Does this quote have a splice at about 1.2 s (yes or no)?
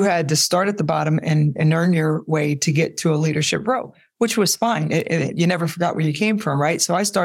no